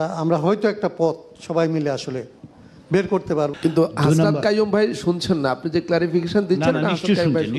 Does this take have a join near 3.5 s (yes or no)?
yes